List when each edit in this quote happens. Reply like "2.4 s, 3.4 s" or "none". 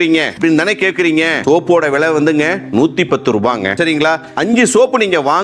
4.3 s